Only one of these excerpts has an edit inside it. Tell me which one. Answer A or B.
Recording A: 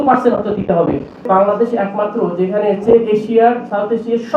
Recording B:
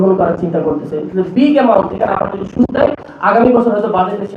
A